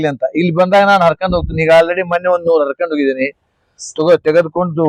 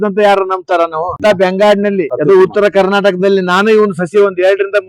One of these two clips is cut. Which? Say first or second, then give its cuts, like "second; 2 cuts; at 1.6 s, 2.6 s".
second; 2 cuts; at 1.1 s, 2.1 s